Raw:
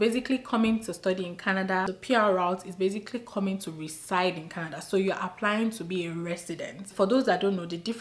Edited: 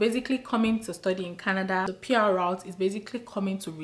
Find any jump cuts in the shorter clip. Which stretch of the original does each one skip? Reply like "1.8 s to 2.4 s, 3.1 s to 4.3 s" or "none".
none